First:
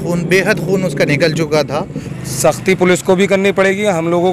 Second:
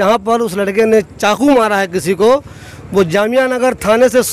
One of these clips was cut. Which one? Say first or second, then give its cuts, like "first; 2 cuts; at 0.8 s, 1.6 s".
first; 1 cut; at 2.0 s